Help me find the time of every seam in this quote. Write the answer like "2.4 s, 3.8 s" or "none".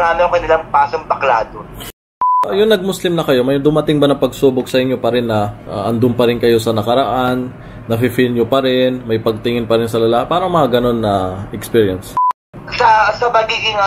2.4 s, 5.6 s, 12.6 s